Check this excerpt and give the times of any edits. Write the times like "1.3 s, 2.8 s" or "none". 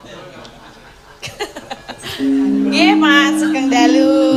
none